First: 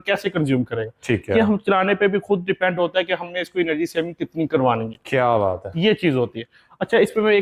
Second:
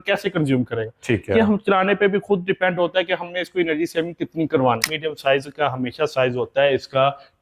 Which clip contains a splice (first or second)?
second